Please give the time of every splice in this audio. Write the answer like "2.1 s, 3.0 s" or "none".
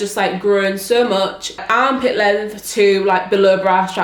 1.6 s

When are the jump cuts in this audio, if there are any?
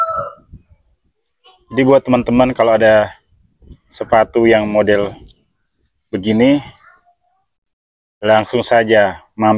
none

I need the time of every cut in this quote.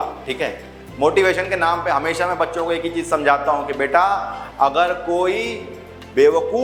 none

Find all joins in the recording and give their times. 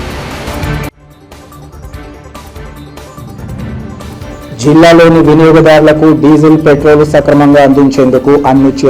4.1 s

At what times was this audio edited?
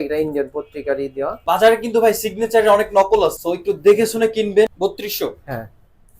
1.4 s, 3.4 s, 4.7 s

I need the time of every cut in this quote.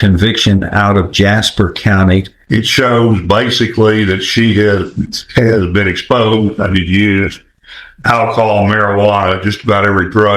2.4 s

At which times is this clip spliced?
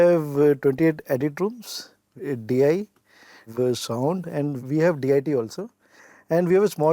2.1 s, 3.5 s, 4.6 s

